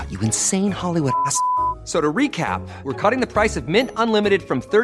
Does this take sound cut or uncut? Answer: uncut